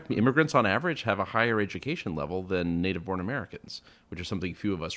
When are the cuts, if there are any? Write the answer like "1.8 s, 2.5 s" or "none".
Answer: none